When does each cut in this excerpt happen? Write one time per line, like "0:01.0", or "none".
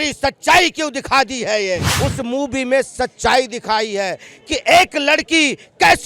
0:01.9

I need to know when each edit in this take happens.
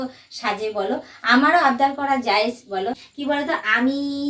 0:03.1

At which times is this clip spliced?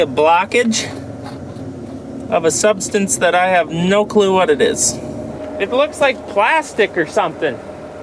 0:05.3

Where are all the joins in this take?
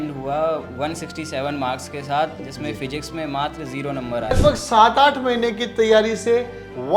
0:04.4

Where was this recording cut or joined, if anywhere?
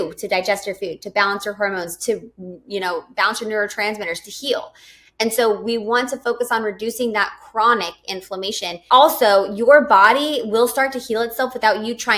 0:08.7

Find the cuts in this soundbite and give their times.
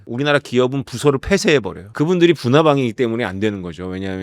0:01.8

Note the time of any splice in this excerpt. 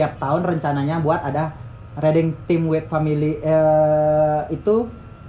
none

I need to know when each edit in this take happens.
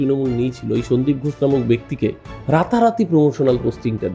0:02.3

